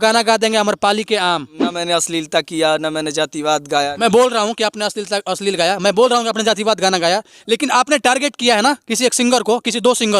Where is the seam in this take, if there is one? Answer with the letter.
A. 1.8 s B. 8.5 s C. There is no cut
A